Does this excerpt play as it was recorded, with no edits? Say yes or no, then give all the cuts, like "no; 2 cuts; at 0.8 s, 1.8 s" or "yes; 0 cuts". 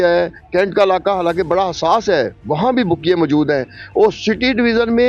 yes; 0 cuts